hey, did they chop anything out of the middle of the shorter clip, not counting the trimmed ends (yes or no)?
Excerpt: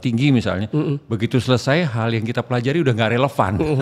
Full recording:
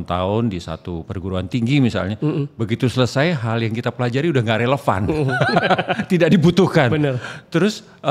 no